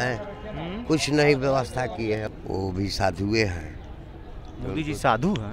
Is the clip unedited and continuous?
no; 1 cut; at 2.2 s

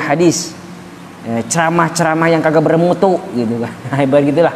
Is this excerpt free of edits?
yes; 0 cuts

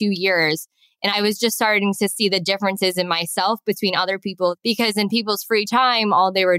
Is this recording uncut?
no; 2 cuts; at 1.1 s, 4.5 s

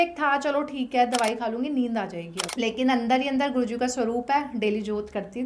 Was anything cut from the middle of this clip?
yes; 1 cut; at 2.4 s

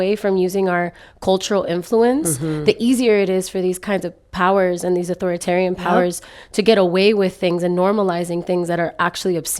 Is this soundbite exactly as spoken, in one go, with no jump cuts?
yes; 0 cuts

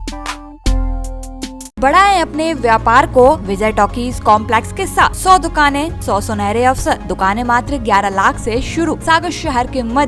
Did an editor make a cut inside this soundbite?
yes; 6 cuts; at 1.8 s, 3.5 s, 5.2 s, 6.0 s, 7.1 s, 9.0 s

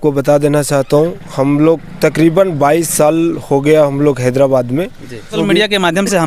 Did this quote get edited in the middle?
yes; 1 cut; at 5.3 s

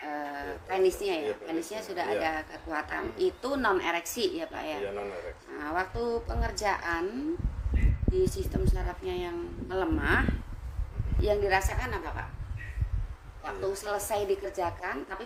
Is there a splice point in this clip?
no; 0 cuts

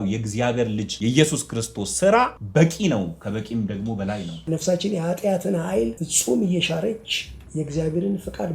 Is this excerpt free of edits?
no; 4 cuts; at 0.9 s, 2.4 s, 4.4 s, 6.1 s

